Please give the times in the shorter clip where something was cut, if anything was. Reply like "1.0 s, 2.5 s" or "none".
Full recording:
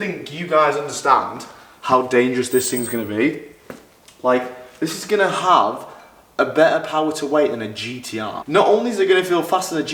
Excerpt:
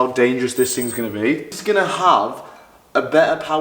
1.5 s